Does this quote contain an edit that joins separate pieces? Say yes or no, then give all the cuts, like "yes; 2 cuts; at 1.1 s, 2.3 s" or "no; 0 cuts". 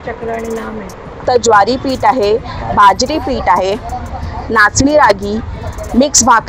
yes; 1 cut; at 1.2 s